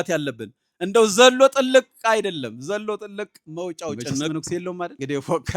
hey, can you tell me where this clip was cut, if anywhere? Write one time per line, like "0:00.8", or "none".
0:04.5